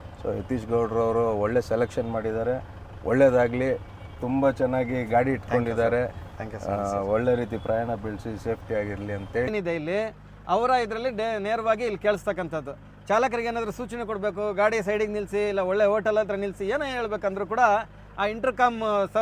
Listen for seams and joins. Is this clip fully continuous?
no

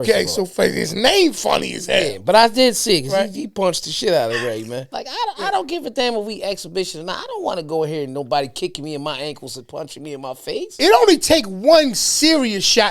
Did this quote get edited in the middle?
yes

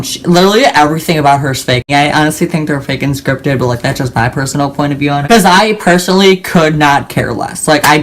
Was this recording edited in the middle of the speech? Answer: yes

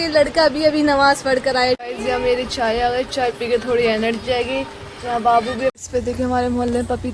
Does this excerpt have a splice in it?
yes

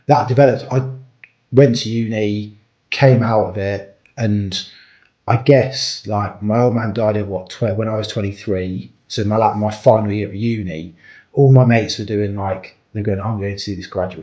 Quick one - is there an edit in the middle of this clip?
no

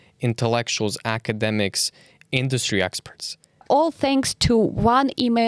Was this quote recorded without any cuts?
no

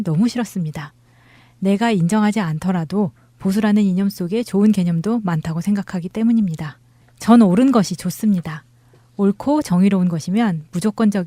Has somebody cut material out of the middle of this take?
yes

